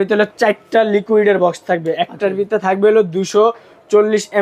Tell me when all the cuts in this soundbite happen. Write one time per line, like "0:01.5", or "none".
none